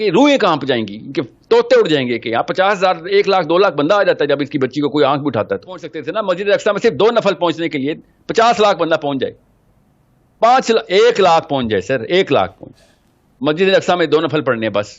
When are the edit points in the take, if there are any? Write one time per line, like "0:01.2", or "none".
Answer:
0:06.0